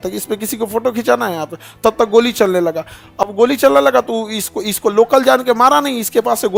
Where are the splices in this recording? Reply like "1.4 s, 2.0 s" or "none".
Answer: none